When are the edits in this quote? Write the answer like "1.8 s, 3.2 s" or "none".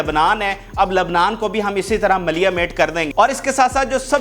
3.1 s